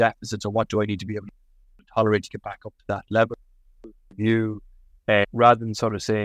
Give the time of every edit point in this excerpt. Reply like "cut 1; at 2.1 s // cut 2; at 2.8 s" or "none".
cut 1; at 5.3 s

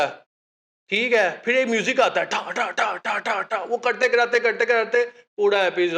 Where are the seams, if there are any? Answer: none

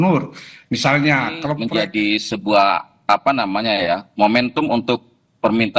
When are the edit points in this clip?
cut 1; at 1.5 s

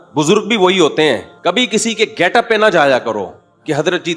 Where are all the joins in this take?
cut 1; at 1.3 s

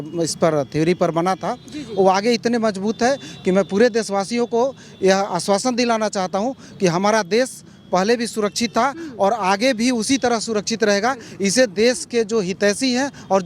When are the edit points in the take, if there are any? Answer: none

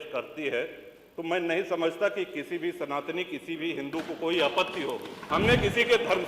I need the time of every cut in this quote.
cut 1; at 5.1 s

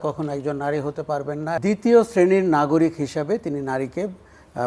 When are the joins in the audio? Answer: cut 1; at 1.6 s

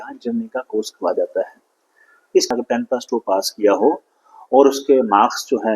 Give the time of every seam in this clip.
cut 1; at 2.5 s

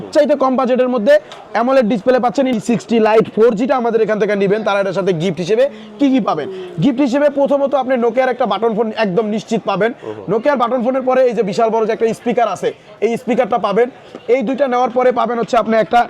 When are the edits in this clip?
cut 1; at 2.5 s

